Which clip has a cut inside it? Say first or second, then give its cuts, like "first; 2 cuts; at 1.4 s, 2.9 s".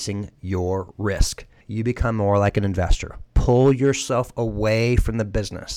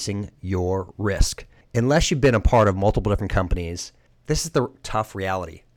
first; 1 cut; at 1.6 s